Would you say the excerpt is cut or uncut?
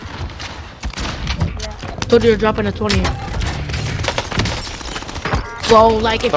cut